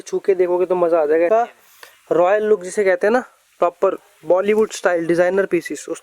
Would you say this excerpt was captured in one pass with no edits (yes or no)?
no